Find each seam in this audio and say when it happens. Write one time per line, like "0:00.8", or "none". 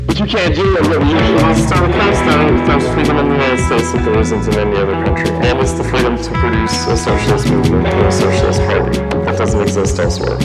none